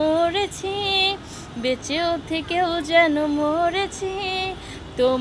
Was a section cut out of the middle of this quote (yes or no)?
no